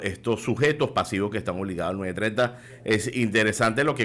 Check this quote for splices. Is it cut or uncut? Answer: cut